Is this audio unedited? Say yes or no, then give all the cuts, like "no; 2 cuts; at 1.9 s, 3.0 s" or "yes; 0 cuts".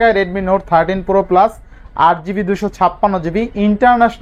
yes; 0 cuts